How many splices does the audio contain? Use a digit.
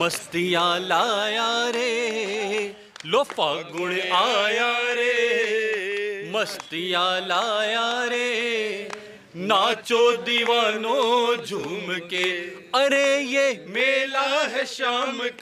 0